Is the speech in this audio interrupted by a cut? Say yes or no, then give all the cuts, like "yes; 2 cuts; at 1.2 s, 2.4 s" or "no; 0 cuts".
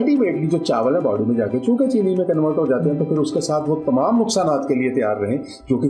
no; 0 cuts